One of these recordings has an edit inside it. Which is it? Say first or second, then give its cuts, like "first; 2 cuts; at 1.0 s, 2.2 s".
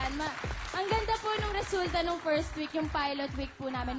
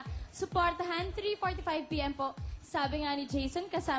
first; 1 cut; at 1.7 s